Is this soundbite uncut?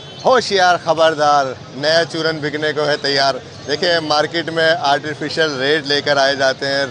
yes; 0 cuts

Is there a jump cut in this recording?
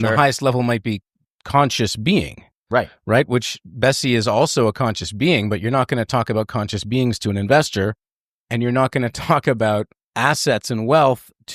yes; 1 cut; at 10.0 s

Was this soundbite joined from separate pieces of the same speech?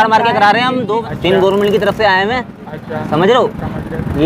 yes; 1 cut; at 1.0 s

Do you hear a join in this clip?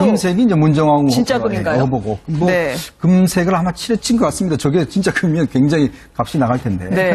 no; 0 cuts

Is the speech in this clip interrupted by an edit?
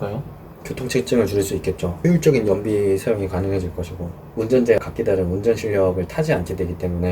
yes; 3 cuts; at 1.9 s, 4.2 s, 4.8 s

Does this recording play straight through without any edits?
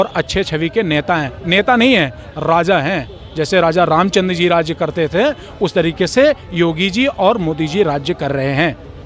yes; 0 cuts

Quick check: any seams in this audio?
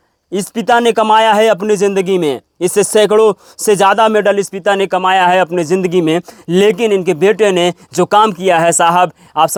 no; 0 cuts

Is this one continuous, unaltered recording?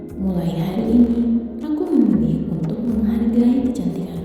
yes; 0 cuts

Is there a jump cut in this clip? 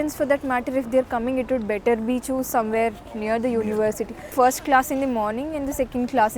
yes; 1 cut; at 4.2 s

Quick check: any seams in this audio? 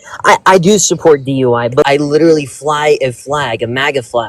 yes; 1 cut; at 1.8 s

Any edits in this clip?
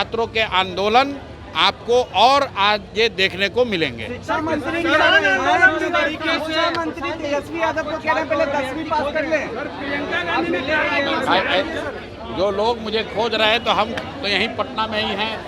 no; 0 cuts

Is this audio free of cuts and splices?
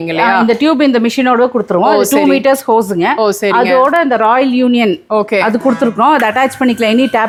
yes; 0 cuts

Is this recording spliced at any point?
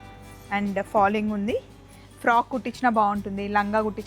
no; 0 cuts

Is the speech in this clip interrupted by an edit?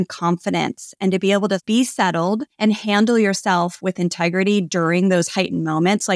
yes; 2 cuts; at 1.6 s, 2.5 s

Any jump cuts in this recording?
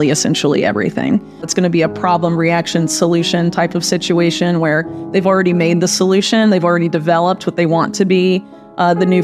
yes; 1 cut; at 1.5 s

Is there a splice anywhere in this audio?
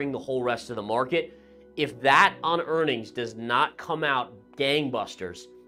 no; 0 cuts

